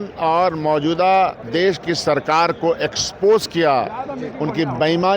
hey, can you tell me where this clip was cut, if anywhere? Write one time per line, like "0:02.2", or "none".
0:01.4